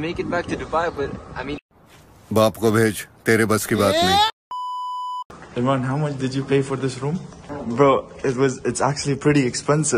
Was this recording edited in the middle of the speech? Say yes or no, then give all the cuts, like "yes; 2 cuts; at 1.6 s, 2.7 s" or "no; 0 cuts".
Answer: yes; 2 cuts; at 5.3 s, 7.4 s